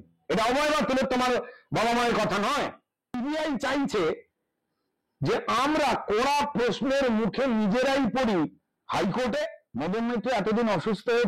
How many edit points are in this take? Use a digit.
2